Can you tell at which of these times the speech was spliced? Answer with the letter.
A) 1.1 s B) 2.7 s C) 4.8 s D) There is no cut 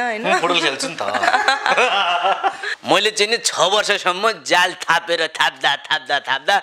B